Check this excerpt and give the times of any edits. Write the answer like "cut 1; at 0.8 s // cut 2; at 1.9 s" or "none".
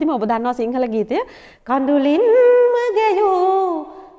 none